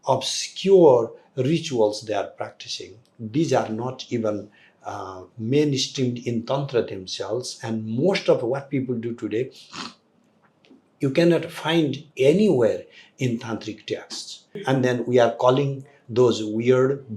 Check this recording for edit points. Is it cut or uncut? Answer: cut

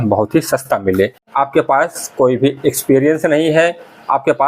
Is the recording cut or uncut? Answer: cut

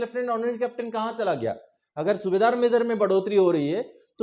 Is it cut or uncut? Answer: uncut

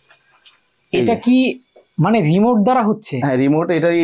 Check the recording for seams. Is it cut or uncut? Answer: uncut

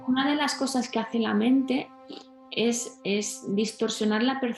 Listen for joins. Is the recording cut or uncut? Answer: uncut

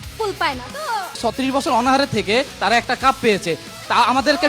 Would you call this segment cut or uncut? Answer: cut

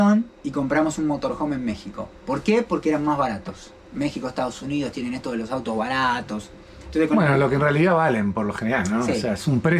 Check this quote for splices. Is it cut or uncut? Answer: uncut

